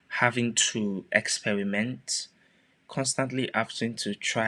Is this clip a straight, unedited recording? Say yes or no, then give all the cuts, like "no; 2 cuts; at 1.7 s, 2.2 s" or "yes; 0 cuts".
yes; 0 cuts